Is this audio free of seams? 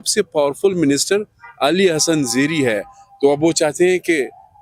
yes; 0 cuts

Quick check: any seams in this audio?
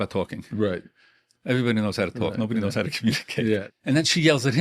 yes; 1 cut; at 3.6 s

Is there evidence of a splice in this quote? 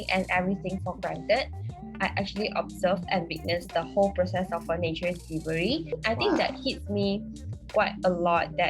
yes; 2 cuts; at 1.8 s, 6.0 s

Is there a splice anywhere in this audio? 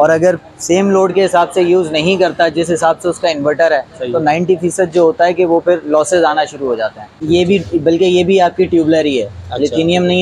yes; 1 cut; at 7.2 s

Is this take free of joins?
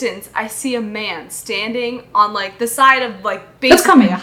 yes; 0 cuts

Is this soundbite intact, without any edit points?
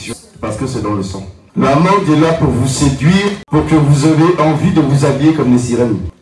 no; 1 cut; at 1.4 s

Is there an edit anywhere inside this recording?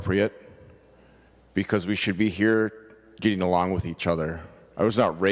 no; 0 cuts

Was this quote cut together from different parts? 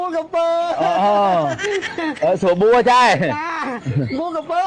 no; 0 cuts

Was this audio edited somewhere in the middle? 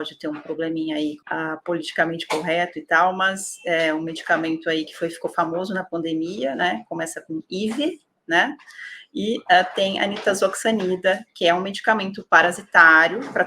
yes; 1 cut; at 1.2 s

